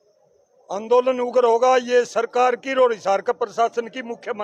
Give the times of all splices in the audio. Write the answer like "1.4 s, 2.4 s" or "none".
none